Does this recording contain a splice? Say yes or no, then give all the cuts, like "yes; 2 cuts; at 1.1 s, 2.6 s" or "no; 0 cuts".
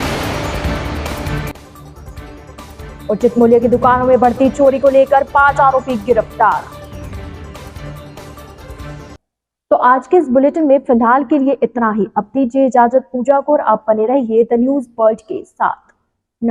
no; 0 cuts